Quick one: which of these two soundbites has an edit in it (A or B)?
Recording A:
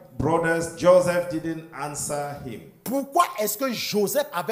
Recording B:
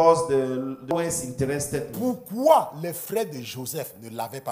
B